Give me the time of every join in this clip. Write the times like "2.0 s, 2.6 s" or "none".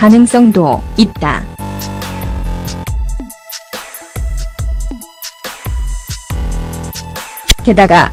none